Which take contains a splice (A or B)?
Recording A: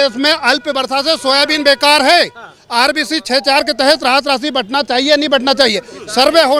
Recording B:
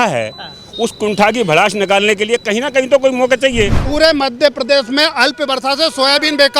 B